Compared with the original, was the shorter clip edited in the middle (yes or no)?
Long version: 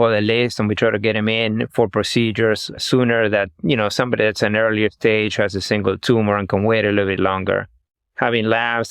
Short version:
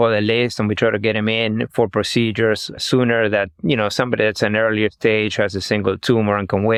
no